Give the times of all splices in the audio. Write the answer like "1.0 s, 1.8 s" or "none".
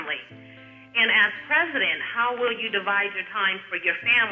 none